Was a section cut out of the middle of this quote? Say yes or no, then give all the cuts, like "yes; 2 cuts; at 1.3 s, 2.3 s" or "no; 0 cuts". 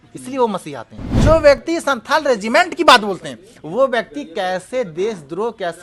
yes; 1 cut; at 1.1 s